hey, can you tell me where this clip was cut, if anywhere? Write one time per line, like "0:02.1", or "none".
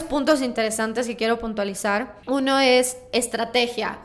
0:02.1